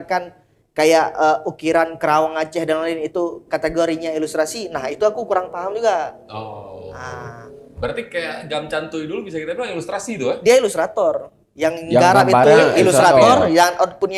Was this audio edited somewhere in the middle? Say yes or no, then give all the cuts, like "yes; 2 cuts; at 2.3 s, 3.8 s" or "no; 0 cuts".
no; 0 cuts